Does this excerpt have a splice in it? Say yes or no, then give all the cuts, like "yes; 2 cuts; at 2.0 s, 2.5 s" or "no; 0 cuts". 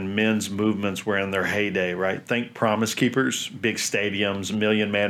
no; 0 cuts